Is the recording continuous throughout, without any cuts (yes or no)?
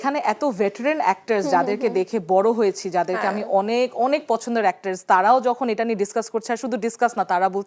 yes